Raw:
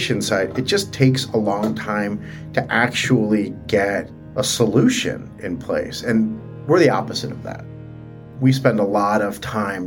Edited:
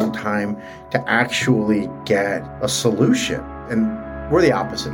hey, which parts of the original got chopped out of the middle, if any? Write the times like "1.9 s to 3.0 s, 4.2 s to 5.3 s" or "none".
4.1 s to 4.3 s, 5.3 s to 5.9 s